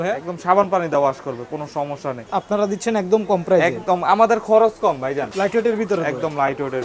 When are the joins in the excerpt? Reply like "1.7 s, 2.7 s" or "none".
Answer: 2.2 s, 5.3 s